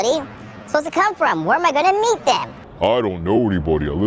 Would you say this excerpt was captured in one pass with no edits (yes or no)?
no